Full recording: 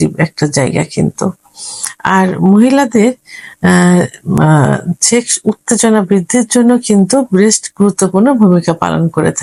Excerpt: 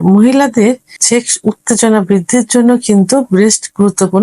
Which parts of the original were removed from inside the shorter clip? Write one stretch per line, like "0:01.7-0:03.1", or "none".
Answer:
0:03.3-0:04.9